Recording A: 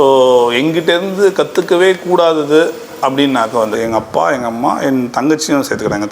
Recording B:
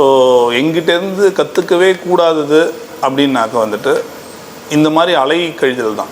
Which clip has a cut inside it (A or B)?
A